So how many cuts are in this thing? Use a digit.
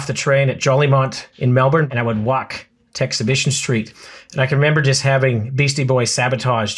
1